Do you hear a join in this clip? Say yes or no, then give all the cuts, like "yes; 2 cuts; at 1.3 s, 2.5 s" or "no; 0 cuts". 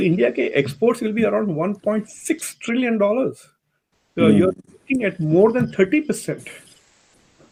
no; 0 cuts